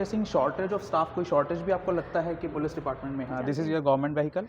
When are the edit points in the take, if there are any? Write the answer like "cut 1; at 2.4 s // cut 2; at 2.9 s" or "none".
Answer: cut 1; at 3.4 s

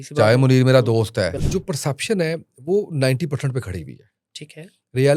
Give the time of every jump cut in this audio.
cut 1; at 1.4 s

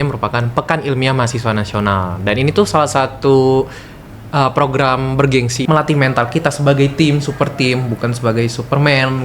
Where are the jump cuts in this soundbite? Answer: cut 1; at 5.6 s

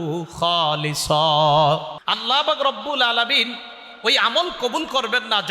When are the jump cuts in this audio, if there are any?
cut 1; at 2.0 s

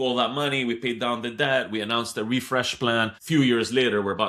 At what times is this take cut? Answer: cut 1; at 3.2 s

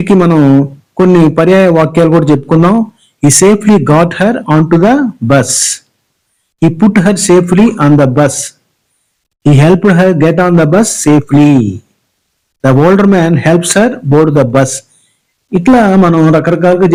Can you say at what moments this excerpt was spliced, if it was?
none

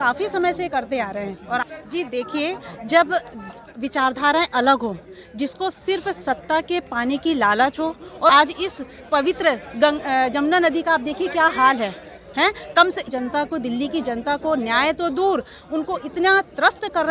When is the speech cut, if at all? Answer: cut 1; at 1.5 s // cut 2; at 8.3 s // cut 3; at 13.1 s

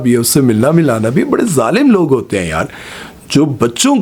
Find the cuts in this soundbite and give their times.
none

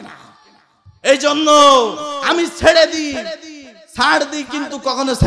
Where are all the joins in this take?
cut 1; at 2.1 s

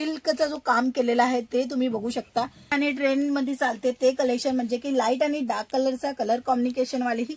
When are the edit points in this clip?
cut 1; at 2.7 s

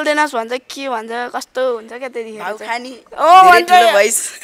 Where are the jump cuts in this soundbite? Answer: none

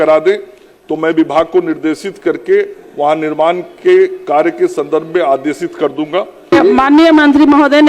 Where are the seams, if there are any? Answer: cut 1; at 6.5 s

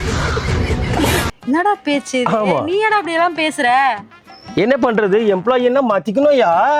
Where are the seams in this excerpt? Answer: none

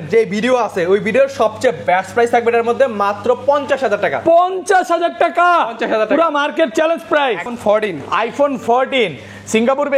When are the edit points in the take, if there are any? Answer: cut 1; at 7.5 s

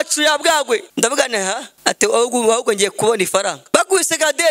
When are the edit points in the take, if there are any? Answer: cut 1; at 0.9 s // cut 2; at 1.7 s // cut 3; at 3.6 s

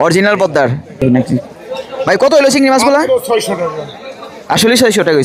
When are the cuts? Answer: cut 1; at 1.0 s

